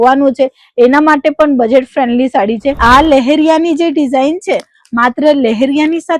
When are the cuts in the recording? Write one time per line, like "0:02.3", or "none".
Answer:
0:02.8